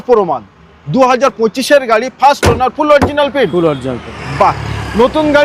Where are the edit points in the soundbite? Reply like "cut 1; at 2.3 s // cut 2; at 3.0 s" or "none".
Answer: none

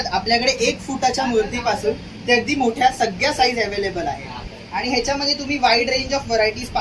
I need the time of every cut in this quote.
none

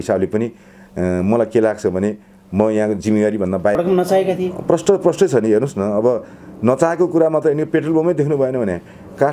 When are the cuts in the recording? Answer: cut 1; at 3.8 s

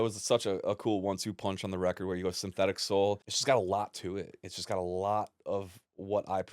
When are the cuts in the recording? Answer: cut 1; at 3.3 s

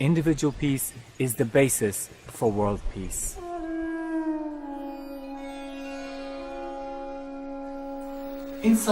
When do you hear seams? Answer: cut 1; at 5.1 s

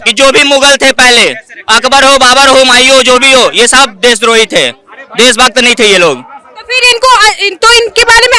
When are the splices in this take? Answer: none

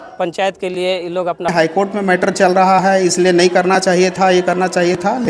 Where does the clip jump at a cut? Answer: cut 1; at 1.5 s

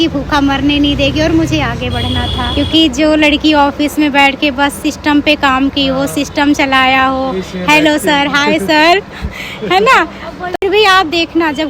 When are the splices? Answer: cut 1; at 2.4 s // cut 2; at 10.5 s

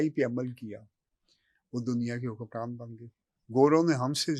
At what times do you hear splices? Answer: none

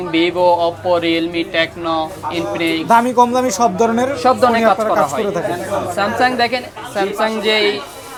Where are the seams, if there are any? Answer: none

